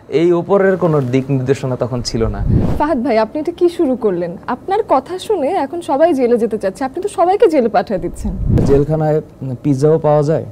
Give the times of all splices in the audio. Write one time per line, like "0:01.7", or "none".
0:02.7
0:08.6